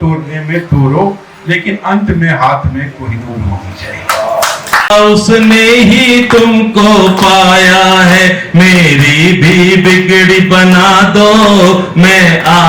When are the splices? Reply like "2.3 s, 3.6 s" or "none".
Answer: 4.9 s

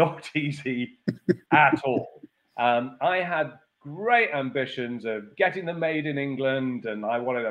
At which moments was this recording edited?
none

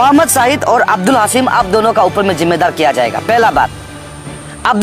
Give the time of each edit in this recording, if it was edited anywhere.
none

